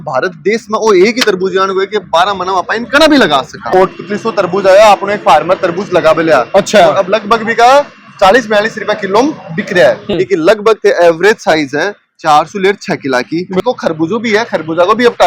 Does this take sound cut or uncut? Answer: cut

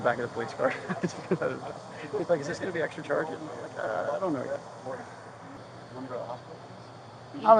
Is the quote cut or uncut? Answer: uncut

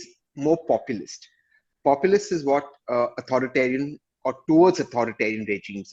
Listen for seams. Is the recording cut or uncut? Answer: uncut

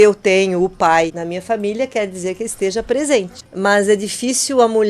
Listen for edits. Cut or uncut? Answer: cut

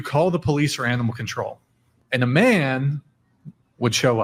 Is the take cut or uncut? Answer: uncut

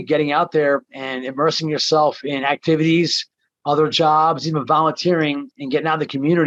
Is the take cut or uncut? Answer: uncut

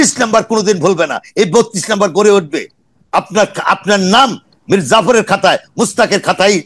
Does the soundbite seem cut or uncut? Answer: uncut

